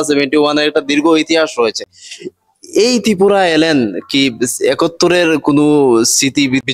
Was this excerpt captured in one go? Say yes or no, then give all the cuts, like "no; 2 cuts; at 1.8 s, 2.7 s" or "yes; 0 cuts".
yes; 0 cuts